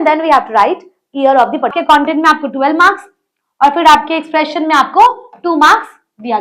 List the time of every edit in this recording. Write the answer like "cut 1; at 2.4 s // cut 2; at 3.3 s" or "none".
cut 1; at 1.8 s